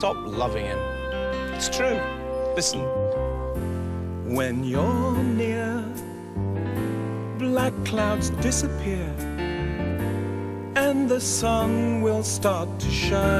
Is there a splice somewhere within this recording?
no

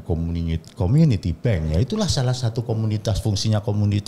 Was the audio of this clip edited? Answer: no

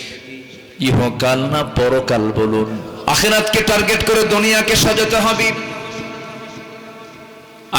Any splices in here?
yes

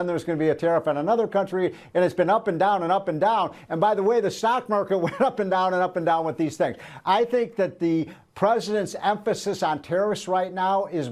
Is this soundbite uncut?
yes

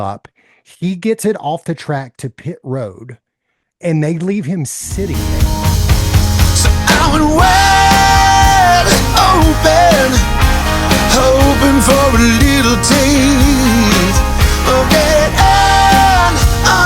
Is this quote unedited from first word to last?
no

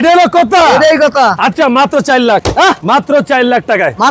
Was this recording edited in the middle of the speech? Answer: no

